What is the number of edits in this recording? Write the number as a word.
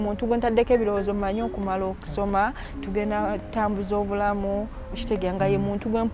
zero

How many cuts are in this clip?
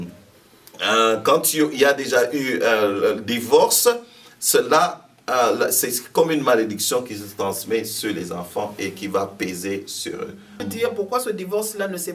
one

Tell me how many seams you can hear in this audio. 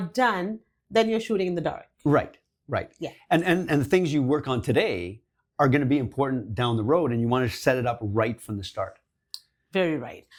zero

